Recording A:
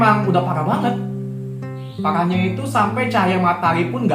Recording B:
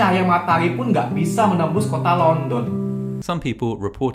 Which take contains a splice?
B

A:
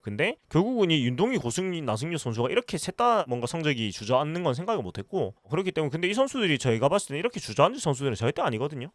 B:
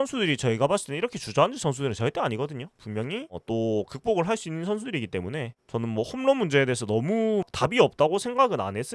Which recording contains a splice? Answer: B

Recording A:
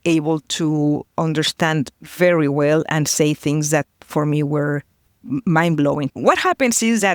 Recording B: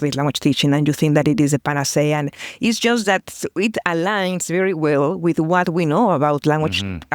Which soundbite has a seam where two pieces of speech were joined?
A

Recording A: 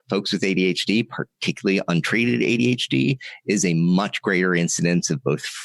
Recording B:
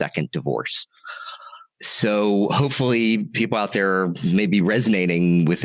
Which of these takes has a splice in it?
B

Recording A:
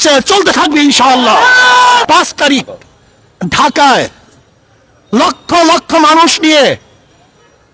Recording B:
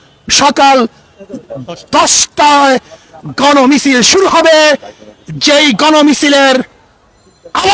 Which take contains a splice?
A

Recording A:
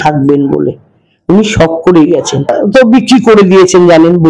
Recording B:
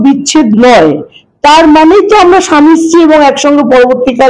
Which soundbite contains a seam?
A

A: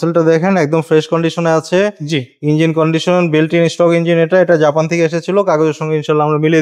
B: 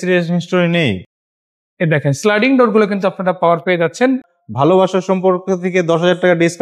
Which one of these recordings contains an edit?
B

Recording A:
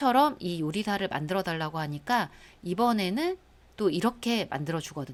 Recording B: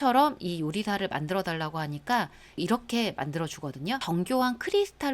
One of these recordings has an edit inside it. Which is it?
B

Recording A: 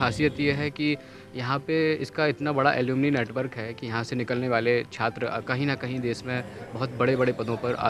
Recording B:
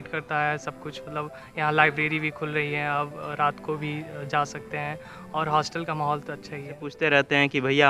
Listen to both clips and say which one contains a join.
B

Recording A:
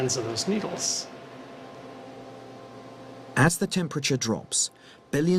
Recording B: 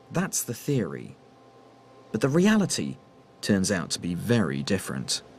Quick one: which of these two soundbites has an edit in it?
A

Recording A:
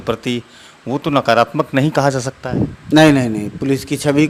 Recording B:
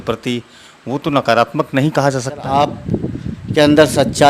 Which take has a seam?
B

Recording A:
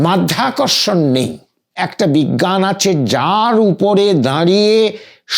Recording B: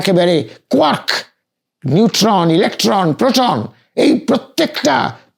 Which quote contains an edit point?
A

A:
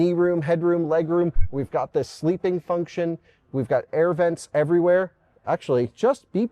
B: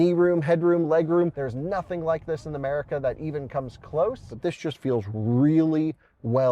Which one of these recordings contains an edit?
B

